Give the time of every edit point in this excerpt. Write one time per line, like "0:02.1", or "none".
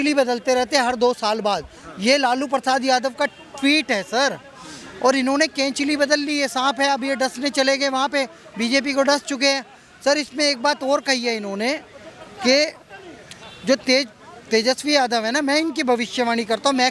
none